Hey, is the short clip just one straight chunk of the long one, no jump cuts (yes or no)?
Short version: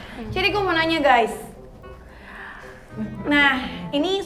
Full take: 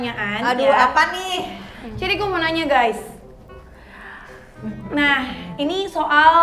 yes